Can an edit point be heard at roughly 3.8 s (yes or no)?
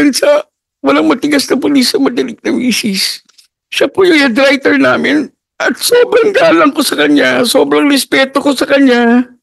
no